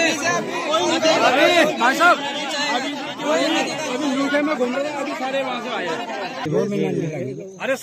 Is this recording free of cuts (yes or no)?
no